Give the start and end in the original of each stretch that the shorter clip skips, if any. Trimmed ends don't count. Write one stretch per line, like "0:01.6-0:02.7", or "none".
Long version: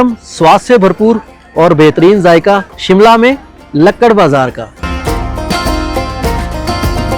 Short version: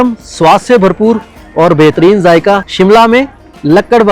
0:02.7-0:02.8